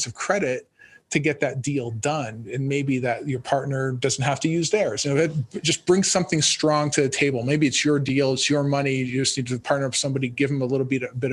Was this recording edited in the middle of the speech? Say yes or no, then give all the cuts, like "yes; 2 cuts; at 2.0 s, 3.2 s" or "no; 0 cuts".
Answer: no; 0 cuts